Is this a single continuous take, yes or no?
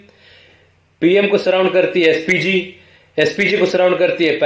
yes